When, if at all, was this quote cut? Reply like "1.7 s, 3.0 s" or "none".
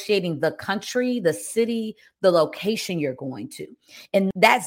none